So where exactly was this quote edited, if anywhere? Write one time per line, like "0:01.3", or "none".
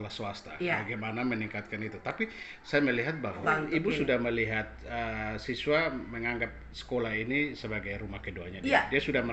0:03.4